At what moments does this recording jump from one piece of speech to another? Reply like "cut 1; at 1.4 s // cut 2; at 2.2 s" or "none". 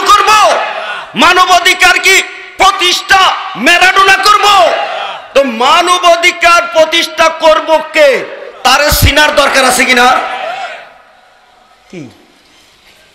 none